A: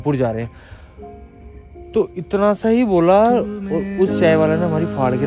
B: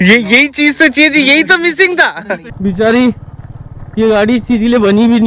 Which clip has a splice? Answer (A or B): B